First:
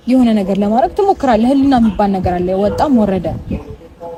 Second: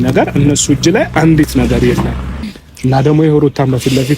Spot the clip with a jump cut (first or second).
second